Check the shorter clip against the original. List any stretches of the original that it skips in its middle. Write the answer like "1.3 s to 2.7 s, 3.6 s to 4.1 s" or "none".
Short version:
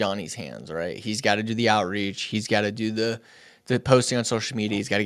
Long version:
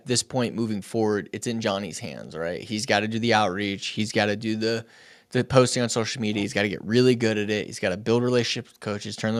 none